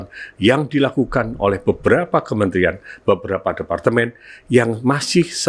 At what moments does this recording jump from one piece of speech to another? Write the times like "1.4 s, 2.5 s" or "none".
none